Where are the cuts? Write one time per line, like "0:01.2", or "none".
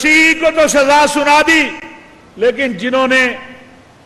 none